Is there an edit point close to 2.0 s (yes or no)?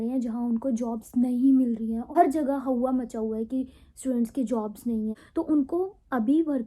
yes